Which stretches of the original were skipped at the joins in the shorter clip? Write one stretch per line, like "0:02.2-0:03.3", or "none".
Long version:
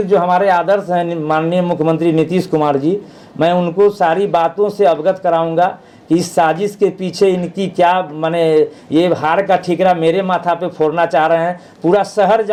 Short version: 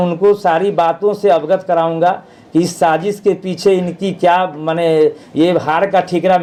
none